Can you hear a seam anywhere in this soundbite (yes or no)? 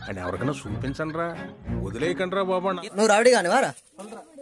yes